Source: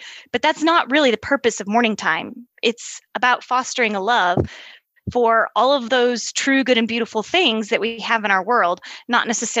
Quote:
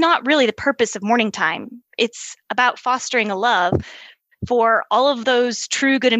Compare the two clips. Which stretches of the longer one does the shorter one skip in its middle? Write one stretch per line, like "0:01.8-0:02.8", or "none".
none